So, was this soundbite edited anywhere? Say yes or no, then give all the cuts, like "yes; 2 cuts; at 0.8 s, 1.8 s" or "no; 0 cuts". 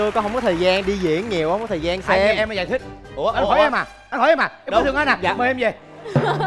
no; 0 cuts